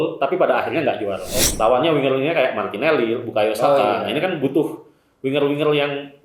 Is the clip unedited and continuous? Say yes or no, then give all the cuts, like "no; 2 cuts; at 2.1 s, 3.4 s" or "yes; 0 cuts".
no; 1 cut; at 1.3 s